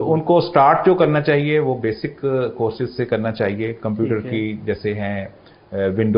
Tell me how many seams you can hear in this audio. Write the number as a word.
zero